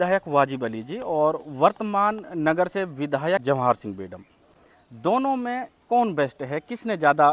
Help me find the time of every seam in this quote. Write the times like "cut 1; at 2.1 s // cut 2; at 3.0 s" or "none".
cut 1; at 3.4 s